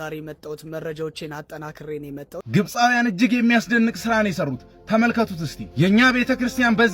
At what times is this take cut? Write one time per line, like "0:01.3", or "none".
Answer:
0:02.4